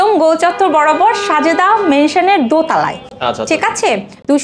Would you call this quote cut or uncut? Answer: uncut